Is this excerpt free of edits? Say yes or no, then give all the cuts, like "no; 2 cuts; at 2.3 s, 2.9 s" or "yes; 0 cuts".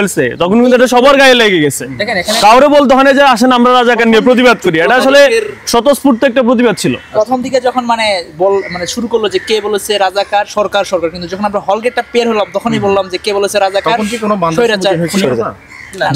yes; 0 cuts